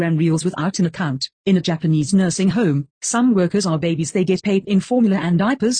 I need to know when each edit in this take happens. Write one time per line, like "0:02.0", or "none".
0:01.4
0:04.0